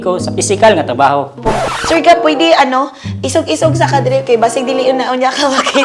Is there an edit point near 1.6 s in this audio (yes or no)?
yes